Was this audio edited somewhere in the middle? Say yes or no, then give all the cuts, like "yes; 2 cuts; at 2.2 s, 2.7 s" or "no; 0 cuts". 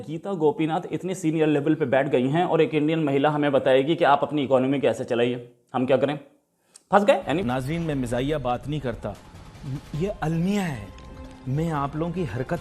yes; 1 cut; at 7.4 s